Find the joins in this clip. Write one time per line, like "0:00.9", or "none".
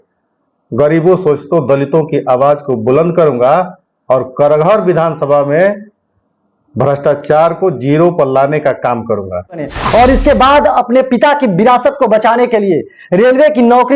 0:09.7